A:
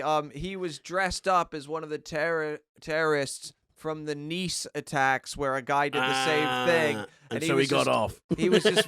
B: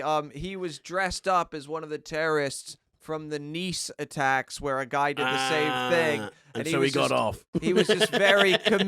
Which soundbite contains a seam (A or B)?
B